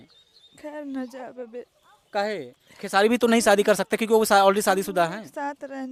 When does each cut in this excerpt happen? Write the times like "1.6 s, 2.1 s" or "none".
none